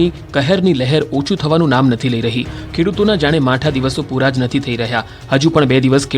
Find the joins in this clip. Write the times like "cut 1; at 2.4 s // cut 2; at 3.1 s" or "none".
cut 1; at 3.3 s